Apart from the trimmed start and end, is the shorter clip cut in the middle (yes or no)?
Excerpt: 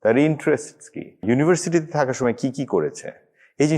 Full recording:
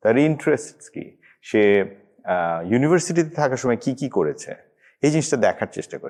yes